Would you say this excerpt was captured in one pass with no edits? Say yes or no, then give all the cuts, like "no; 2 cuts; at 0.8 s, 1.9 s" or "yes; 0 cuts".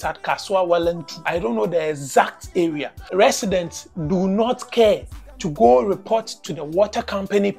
no; 2 cuts; at 1.1 s, 3.0 s